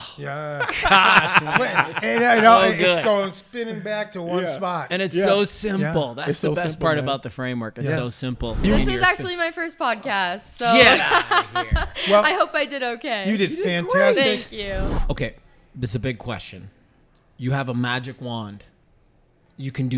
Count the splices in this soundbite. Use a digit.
2